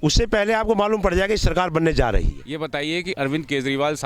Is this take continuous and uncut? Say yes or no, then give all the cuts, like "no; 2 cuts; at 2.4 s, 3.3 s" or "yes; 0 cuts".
no; 1 cut; at 2.4 s